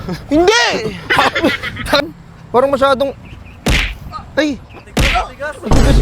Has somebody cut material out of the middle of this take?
yes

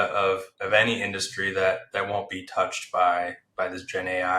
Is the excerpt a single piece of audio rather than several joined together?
yes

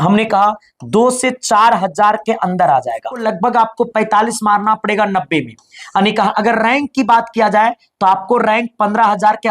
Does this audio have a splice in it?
yes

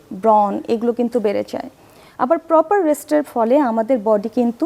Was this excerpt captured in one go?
yes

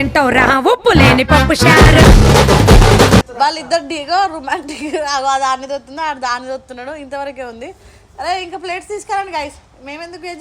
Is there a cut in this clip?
yes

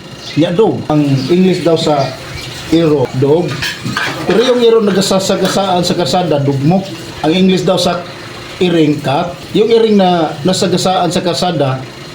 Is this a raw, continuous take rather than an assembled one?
no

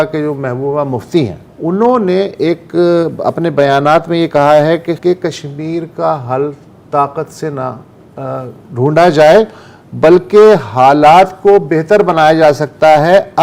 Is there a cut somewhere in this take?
yes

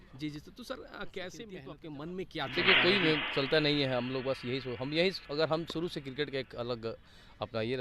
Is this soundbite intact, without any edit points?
no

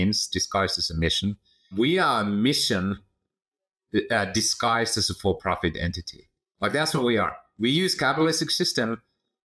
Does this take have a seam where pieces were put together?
yes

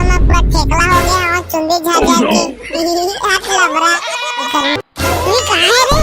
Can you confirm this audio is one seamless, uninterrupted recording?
no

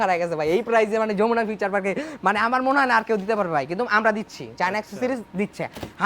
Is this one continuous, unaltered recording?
yes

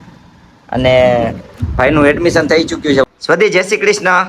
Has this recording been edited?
yes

